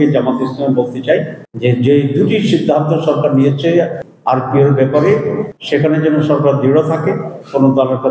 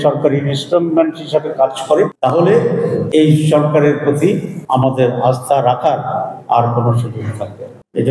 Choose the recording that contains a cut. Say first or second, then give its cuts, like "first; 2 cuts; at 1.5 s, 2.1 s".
second; 3 cuts; at 2.1 s, 3.1 s, 4.5 s